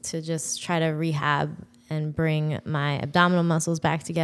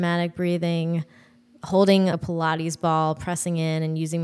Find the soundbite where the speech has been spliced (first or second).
second